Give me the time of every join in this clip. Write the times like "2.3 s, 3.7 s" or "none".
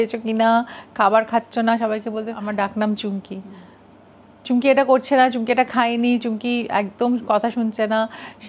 2.4 s